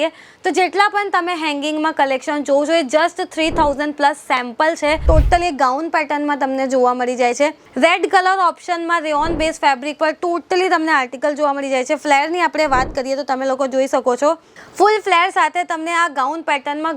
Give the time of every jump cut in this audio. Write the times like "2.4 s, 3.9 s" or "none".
5.0 s